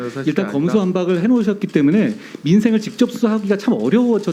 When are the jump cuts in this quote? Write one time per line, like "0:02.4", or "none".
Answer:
none